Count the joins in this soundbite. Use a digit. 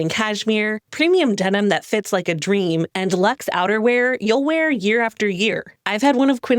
1